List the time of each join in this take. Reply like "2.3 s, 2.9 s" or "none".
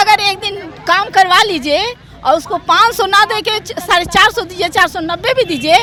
none